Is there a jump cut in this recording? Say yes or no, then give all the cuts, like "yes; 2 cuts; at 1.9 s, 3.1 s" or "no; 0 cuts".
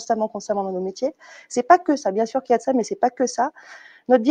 no; 0 cuts